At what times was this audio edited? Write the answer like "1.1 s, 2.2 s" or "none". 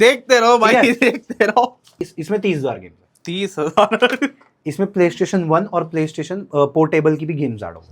1.9 s